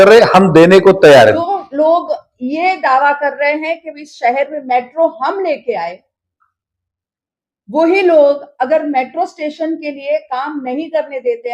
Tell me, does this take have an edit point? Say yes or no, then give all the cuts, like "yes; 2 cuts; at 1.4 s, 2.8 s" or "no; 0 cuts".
yes; 1 cut; at 1.4 s